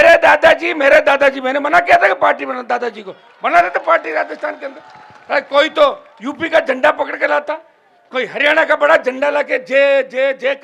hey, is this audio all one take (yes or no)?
yes